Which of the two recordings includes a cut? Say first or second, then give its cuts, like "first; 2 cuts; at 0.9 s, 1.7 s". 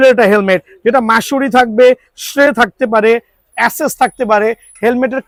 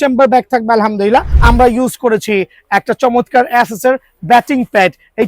second; 1 cut; at 1.3 s